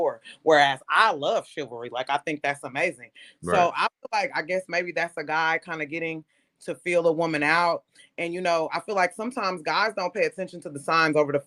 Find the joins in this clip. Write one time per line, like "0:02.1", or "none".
none